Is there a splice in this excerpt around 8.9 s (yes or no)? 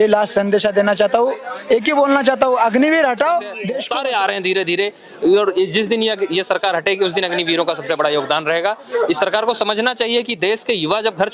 no